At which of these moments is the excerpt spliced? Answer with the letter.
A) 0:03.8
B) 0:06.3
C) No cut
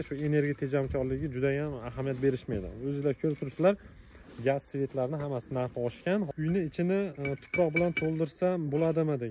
B